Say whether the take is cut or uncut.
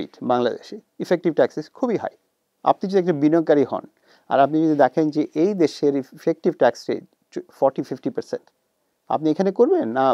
uncut